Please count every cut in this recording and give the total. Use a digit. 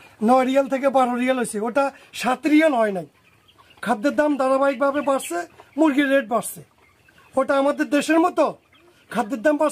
0